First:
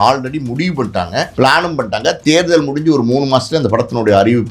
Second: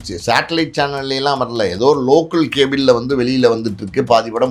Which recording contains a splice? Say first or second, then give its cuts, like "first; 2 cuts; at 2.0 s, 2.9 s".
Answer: first; 1 cut; at 1.3 s